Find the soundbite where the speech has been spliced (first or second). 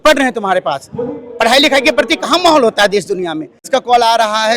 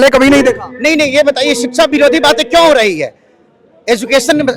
first